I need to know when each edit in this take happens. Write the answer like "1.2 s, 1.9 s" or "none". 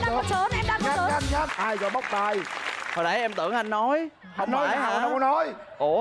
1.5 s